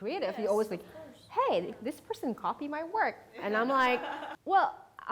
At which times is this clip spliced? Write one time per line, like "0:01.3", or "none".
0:04.0